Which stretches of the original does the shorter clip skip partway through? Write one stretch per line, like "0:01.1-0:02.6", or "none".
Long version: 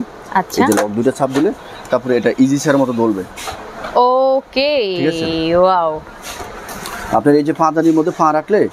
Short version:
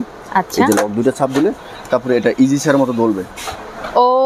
none